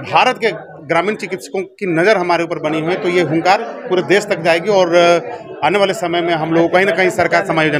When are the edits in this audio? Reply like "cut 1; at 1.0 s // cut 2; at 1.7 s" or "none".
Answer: none